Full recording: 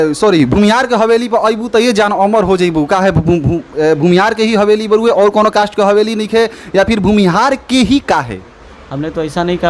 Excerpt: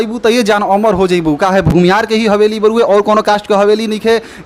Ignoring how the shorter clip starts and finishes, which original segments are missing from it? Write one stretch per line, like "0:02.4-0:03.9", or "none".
0:03.2-0:04.0

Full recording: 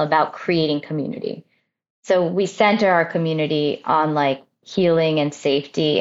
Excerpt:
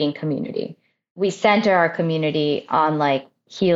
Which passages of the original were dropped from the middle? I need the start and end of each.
0:01.8-0:02.3

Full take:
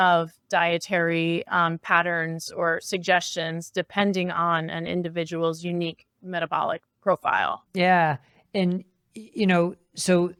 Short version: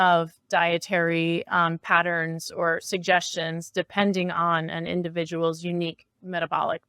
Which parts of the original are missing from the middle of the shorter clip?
none

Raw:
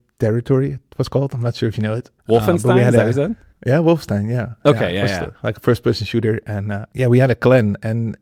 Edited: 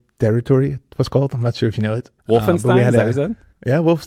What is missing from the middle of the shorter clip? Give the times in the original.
none

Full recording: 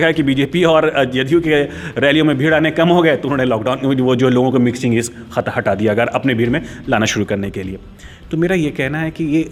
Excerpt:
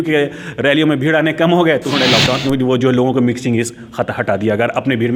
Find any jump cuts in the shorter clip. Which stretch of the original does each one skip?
none

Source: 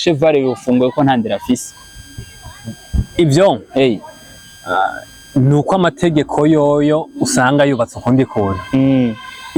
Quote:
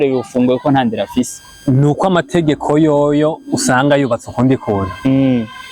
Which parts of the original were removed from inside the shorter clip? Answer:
0:01.8-0:05.1

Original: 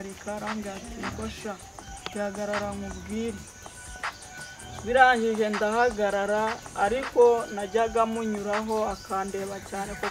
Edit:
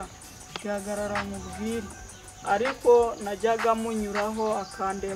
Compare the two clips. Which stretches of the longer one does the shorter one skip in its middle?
0:03.8-0:06.6

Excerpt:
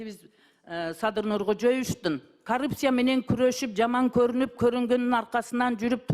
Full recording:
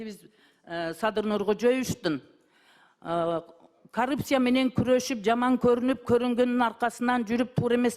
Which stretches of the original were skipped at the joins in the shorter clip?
0:02.3-0:03.8

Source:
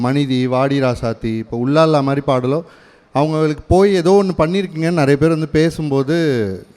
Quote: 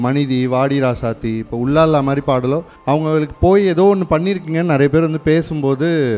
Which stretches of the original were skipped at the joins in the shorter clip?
0:02.7-0:03.0

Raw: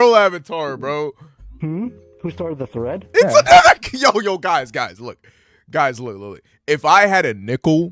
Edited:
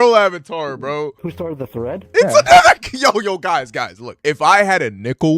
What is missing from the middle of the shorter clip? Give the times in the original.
0:01.2-0:02.2
0:05.0-0:06.5

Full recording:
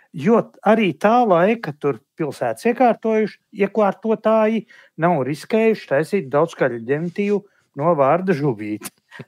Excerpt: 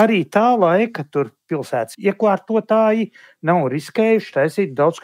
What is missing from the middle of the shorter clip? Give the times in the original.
0:02.6-0:03.4

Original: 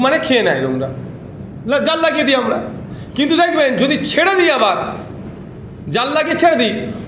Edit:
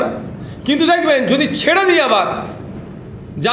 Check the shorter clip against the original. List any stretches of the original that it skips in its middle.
none

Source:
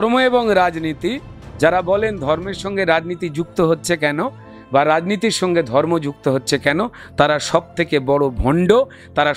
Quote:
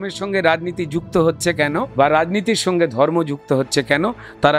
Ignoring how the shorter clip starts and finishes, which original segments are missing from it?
0:04.3-0:04.6

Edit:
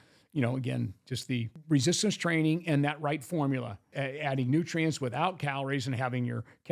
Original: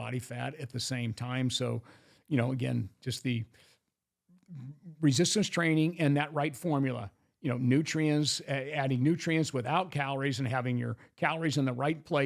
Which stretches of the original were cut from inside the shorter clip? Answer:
0:03.5-0:04.9
0:07.2-0:08.4

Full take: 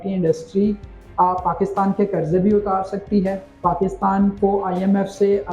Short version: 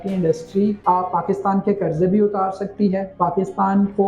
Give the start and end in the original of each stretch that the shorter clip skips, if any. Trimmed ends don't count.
0:00.8-0:01.1
0:03.4-0:03.5

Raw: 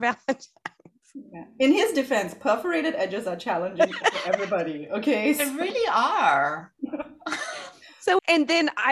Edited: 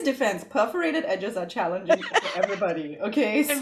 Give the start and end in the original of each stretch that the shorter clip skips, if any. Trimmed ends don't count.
none

